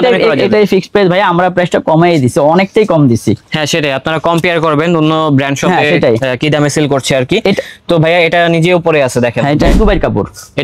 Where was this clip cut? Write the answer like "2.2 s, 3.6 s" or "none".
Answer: 9.7 s

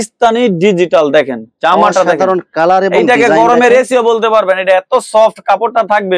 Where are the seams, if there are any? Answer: none

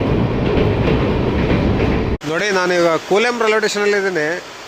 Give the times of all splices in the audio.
2.2 s

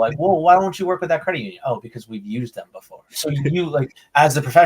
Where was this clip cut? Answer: 3.1 s

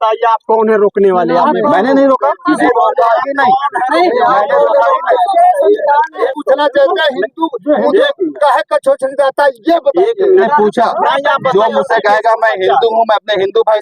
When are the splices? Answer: 2.6 s, 6.2 s, 10.5 s

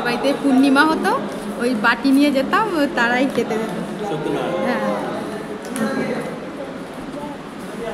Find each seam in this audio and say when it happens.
none

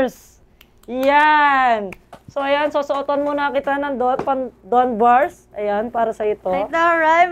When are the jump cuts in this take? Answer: none

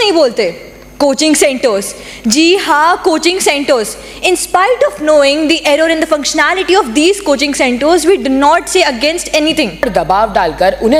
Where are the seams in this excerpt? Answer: 9.8 s

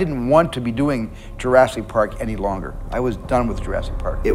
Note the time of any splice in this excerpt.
none

